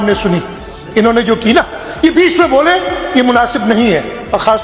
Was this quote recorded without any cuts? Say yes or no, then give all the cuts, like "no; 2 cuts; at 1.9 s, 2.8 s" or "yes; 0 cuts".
yes; 0 cuts